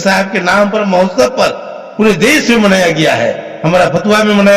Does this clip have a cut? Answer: no; 0 cuts

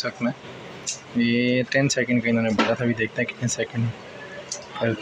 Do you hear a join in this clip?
no; 0 cuts

